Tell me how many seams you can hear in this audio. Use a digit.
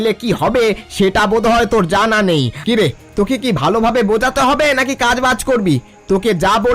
1